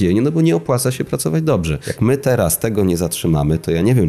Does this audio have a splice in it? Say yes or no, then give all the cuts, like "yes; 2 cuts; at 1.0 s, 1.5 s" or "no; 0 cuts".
yes; 1 cut; at 1.8 s